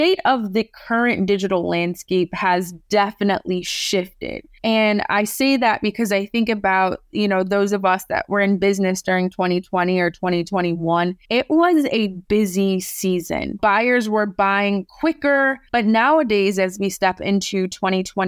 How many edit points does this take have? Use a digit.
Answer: 1